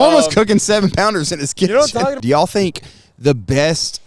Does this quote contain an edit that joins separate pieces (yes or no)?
yes